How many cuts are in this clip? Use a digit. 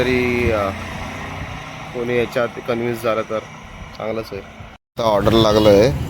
1